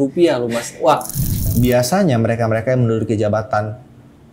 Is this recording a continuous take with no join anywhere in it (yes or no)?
no